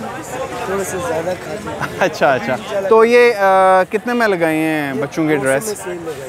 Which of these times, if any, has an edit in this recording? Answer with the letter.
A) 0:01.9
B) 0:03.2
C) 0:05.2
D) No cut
D